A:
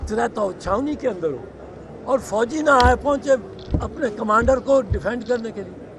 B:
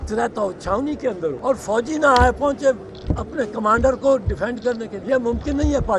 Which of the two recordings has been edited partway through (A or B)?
B